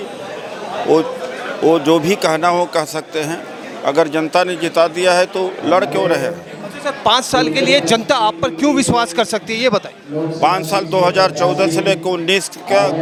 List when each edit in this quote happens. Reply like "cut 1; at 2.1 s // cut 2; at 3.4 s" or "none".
none